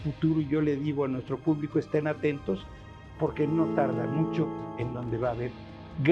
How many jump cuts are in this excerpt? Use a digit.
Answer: 1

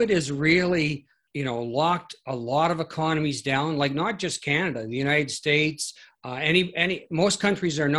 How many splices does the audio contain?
1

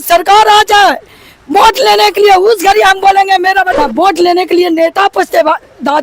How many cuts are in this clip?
1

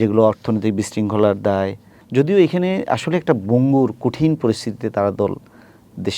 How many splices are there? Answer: 1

